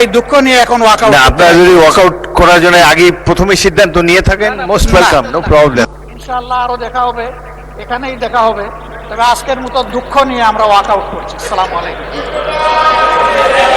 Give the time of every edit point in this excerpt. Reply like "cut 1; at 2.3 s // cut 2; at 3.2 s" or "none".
cut 1; at 5.9 s